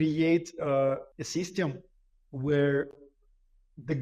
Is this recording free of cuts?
no; 1 cut; at 1.1 s

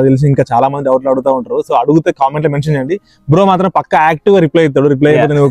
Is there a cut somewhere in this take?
no; 0 cuts

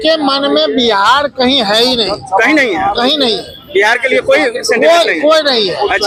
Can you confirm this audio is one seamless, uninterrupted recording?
yes; 0 cuts

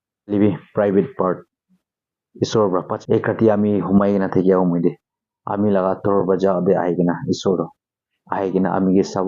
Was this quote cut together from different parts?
yes; 1 cut; at 3.0 s

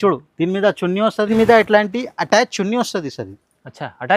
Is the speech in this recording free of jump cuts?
no; 1 cut; at 1.3 s

